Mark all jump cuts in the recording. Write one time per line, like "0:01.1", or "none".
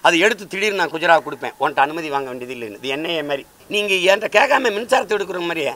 0:03.5